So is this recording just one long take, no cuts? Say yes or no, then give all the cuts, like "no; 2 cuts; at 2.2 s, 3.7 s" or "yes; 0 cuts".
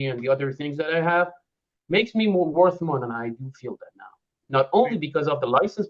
yes; 0 cuts